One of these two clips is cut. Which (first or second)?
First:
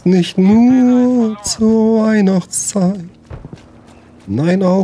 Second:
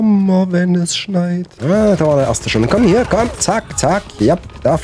second